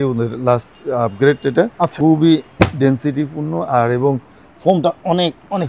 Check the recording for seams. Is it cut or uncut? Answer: cut